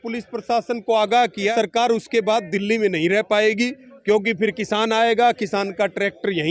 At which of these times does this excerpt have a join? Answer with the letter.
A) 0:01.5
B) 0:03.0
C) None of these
A